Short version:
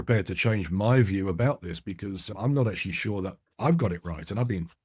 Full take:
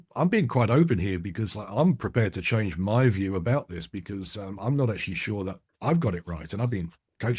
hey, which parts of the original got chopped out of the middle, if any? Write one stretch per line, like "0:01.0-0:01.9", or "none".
0:04.4-0:04.5